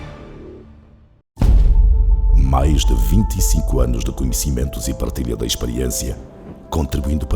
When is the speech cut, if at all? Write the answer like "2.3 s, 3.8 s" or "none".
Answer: 1.3 s